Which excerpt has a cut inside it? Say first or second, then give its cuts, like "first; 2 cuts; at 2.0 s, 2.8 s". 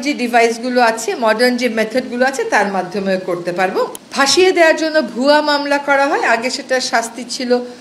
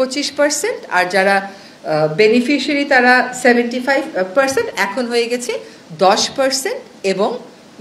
first; 1 cut; at 4.0 s